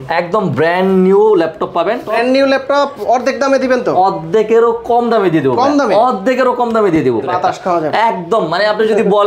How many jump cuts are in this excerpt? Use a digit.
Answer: 2